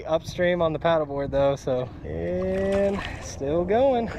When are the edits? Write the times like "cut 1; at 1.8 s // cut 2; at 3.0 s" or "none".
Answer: cut 1; at 2.0 s